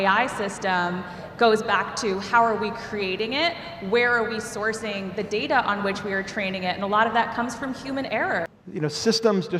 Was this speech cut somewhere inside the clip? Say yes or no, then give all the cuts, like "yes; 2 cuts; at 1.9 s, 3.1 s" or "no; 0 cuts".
yes; 1 cut; at 8.5 s